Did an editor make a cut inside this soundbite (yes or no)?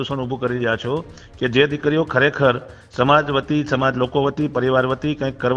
no